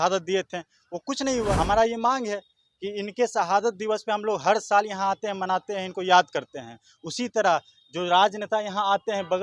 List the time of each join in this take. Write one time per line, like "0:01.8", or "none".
0:01.6